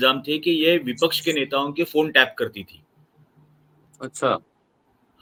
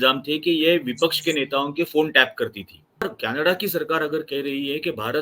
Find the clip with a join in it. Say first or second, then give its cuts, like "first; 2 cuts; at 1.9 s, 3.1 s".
second; 1 cut; at 3.0 s